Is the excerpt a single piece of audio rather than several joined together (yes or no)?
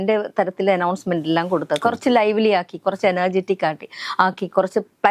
yes